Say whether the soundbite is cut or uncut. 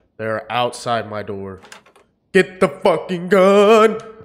uncut